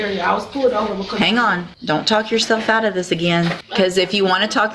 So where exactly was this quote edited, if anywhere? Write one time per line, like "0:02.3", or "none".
0:01.7
0:03.6